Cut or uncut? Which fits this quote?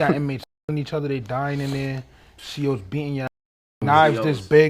cut